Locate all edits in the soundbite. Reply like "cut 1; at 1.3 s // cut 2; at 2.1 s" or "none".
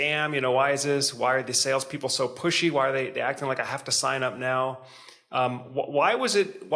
none